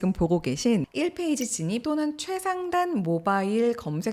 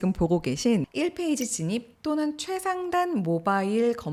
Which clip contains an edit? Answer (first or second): first